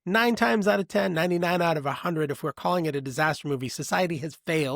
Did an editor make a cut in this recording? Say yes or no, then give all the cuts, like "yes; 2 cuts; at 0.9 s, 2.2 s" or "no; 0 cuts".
no; 0 cuts